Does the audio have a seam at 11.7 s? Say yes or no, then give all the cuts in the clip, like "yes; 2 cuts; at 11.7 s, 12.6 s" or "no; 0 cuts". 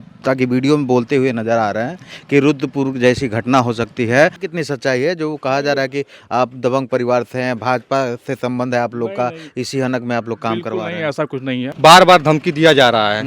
yes; 2 cuts; at 4.4 s, 11.7 s